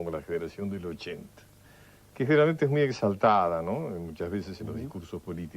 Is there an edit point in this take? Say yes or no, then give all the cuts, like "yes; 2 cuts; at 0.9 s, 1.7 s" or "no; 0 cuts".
yes; 1 cut; at 1.1 s